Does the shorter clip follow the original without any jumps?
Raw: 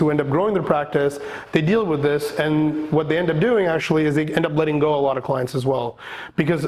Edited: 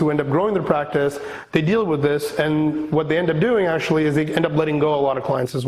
yes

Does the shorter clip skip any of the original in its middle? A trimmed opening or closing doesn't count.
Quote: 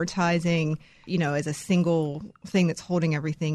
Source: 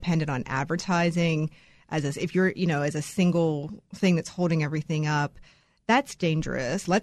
yes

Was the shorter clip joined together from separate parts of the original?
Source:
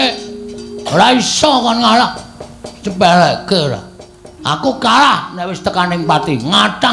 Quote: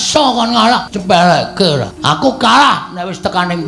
yes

